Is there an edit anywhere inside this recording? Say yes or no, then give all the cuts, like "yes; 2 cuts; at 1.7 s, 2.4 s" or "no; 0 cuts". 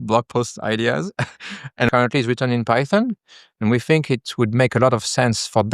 yes; 1 cut; at 1.9 s